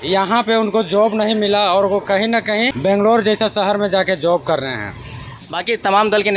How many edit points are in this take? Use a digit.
2